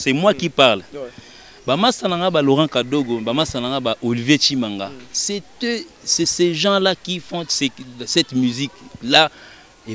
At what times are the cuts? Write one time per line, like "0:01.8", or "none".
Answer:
none